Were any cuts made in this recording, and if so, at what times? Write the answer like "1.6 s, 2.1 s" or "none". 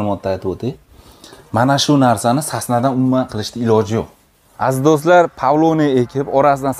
4.4 s